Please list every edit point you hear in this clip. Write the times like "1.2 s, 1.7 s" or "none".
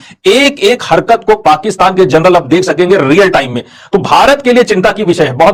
none